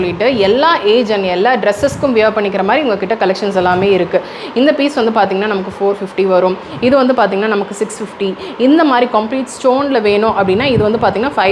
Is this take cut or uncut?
uncut